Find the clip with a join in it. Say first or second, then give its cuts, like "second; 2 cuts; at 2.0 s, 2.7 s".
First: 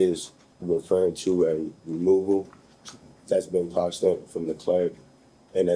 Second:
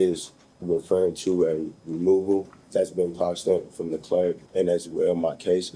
second; 2 cuts; at 2.6 s, 4.4 s